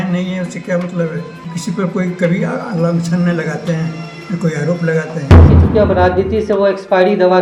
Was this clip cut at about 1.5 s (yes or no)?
yes